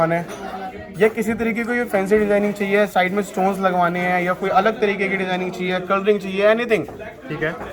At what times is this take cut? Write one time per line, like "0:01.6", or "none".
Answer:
none